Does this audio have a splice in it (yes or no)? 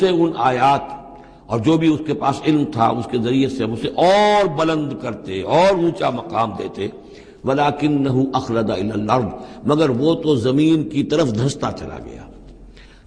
no